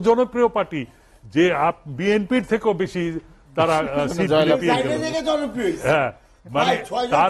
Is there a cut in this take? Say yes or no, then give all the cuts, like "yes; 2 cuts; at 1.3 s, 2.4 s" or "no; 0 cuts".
no; 0 cuts